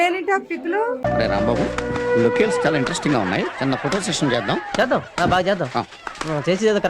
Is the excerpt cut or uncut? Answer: cut